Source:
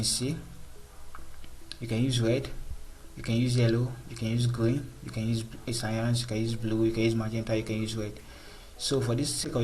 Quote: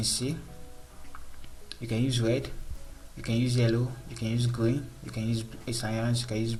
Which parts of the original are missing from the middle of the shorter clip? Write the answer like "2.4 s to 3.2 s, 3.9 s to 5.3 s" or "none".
none